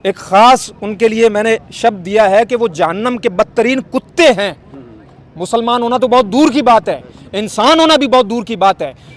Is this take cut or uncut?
uncut